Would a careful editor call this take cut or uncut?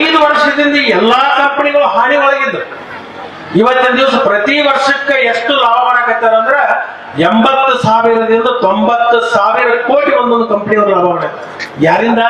uncut